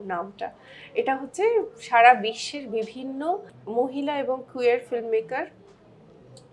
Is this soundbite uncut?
yes; 0 cuts

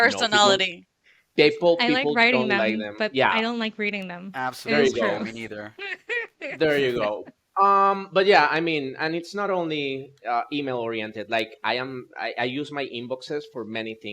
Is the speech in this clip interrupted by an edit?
no; 0 cuts

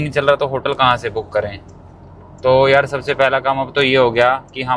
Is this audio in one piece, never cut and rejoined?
yes; 0 cuts

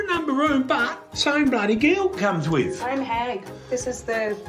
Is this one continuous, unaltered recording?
yes; 0 cuts

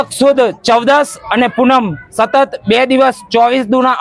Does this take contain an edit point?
no; 0 cuts

